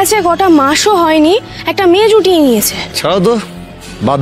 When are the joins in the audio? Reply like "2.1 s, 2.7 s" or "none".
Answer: 2.8 s

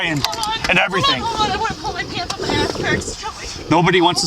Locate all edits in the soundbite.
none

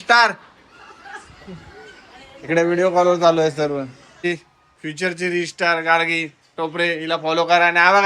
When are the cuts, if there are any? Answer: 4.2 s

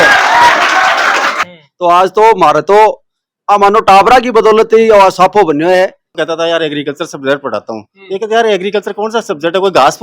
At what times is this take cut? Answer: 1.5 s, 6.1 s

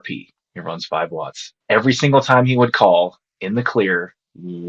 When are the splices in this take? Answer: none

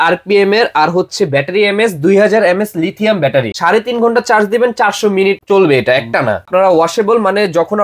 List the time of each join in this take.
3.5 s, 6.5 s

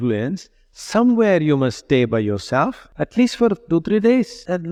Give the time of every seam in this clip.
none

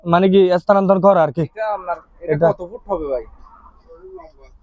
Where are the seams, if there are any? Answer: none

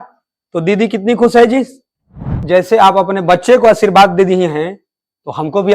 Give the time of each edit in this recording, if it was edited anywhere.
2.4 s

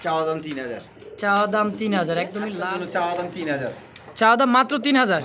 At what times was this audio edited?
2.5 s

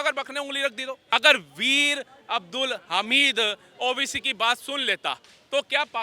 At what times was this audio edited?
1.0 s

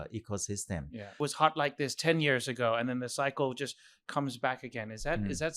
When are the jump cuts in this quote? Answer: 1.2 s

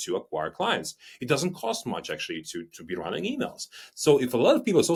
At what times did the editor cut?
none

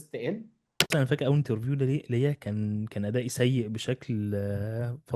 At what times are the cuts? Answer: 0.9 s

